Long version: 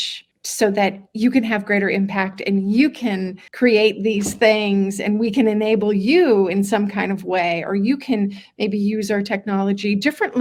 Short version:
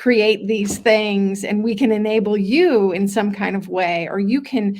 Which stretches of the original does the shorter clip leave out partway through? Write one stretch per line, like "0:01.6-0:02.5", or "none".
none